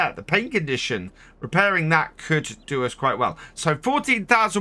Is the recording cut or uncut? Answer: cut